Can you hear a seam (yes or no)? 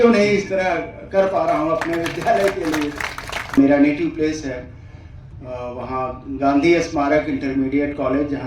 yes